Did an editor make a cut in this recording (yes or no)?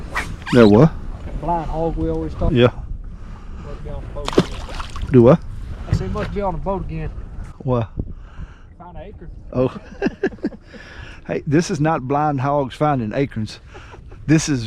yes